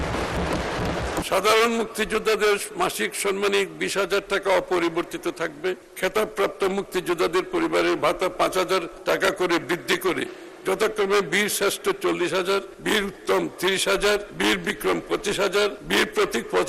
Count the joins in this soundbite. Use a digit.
6